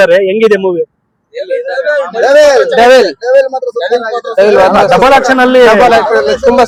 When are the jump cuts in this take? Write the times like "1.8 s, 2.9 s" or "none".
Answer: none